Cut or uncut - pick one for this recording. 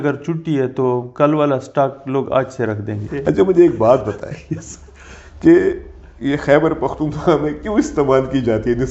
cut